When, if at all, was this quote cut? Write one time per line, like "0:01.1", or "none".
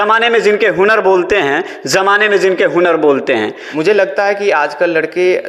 0:03.6

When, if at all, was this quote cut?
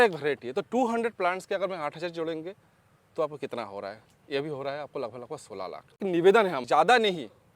0:06.0

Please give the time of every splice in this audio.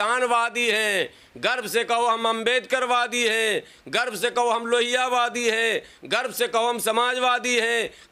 none

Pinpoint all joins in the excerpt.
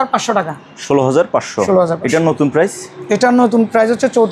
none

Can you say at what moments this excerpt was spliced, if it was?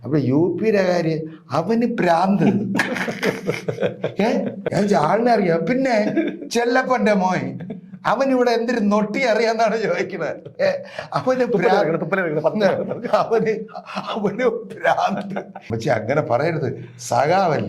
0:04.6
0:15.6

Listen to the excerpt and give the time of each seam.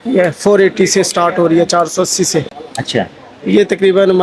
none

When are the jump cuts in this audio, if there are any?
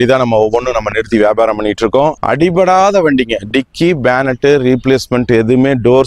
0:02.2

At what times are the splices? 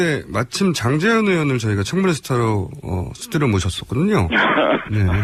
none

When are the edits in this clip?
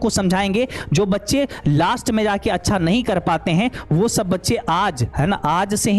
none

